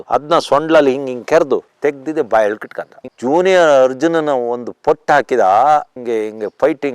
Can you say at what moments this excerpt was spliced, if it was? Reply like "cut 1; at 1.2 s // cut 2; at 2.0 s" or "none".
cut 1; at 3.0 s // cut 2; at 6.0 s